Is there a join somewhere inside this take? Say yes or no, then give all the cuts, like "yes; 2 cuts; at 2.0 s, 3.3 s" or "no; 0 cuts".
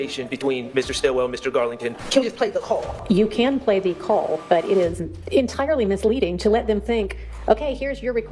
yes; 3 cuts; at 2.0 s, 2.9 s, 5.1 s